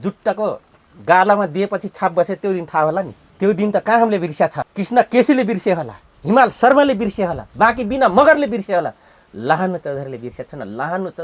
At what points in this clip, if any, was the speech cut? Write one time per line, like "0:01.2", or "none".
0:03.2
0:04.7